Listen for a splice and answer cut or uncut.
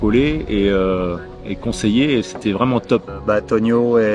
cut